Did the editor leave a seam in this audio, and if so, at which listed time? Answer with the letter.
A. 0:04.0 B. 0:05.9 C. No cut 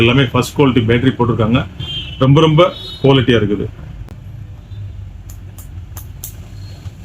A